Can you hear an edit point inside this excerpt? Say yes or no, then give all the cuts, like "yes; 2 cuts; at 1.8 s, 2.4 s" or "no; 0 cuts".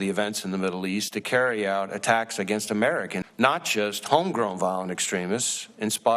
yes; 1 cut; at 3.2 s